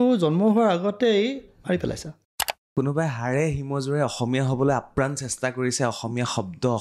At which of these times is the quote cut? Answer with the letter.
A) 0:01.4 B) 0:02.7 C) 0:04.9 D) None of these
B